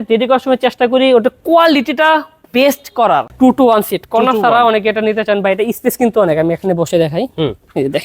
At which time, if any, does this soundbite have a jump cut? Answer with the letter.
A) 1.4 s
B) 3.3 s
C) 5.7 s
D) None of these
B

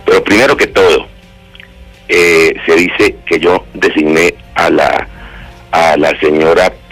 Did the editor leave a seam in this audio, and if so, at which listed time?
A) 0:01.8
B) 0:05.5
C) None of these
B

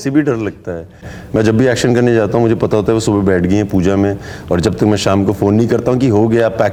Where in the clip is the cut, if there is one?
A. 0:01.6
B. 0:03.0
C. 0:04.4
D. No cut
D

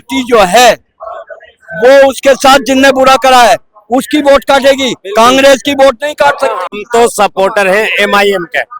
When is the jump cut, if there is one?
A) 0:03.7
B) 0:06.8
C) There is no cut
B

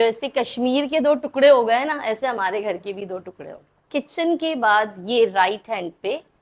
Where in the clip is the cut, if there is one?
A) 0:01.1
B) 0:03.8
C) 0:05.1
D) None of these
B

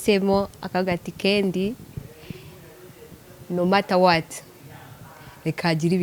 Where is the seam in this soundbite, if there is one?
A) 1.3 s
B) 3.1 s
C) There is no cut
C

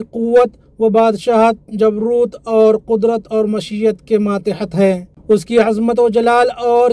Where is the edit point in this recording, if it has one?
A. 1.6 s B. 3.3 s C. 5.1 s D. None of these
C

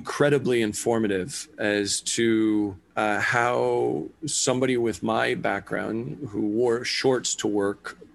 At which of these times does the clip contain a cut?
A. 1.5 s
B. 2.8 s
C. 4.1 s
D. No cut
B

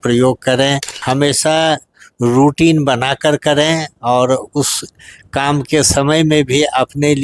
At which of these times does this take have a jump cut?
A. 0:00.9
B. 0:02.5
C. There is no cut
A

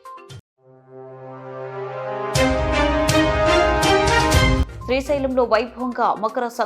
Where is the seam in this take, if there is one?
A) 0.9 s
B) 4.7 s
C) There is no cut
B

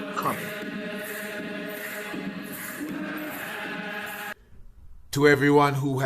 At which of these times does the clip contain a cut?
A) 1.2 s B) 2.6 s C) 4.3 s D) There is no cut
C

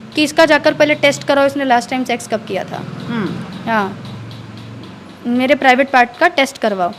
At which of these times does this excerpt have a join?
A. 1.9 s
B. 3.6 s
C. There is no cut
C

